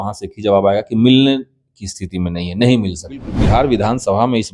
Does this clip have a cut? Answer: yes; 1 cut; at 3.3 s

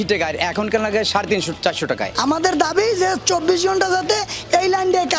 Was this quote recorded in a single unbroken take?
yes; 0 cuts

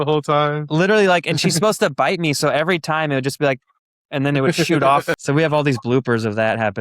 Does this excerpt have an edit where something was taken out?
yes; 1 cut; at 5.2 s

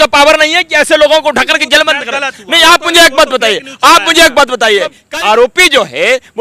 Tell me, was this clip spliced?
yes; 1 cut; at 5.0 s

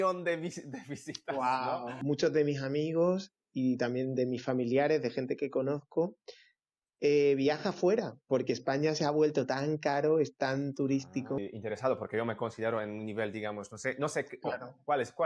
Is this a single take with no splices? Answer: no; 2 cuts; at 1.9 s, 11.4 s

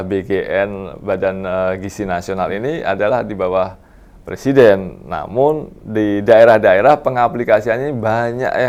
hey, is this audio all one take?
yes; 0 cuts

